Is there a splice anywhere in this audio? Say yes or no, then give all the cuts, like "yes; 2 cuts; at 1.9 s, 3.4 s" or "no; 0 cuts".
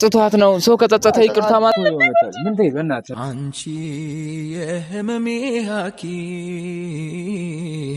yes; 1 cut; at 1.7 s